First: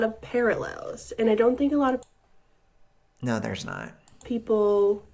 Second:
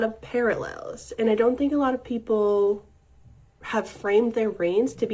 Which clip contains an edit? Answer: second; 1 cut; at 2.0 s

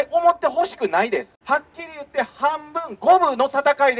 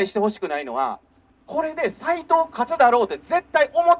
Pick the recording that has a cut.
first; 1 cut; at 1.3 s

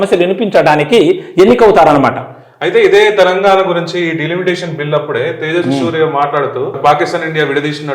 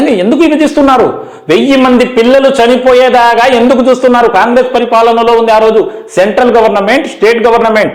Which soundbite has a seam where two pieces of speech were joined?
first; 1 cut; at 6.8 s

